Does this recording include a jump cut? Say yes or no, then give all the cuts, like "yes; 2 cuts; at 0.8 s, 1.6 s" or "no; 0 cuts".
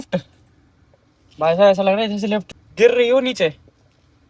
yes; 1 cut; at 2.5 s